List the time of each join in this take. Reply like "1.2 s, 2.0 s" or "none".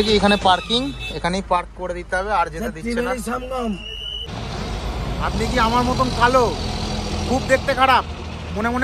4.0 s